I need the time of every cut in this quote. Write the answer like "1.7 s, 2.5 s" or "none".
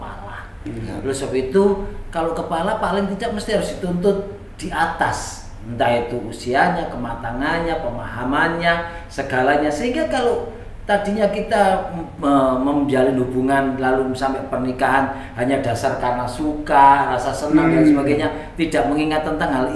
none